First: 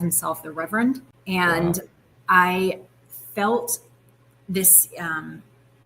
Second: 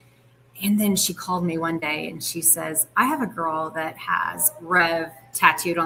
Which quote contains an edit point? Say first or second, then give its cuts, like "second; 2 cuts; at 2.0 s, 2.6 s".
first; 1 cut; at 1.1 s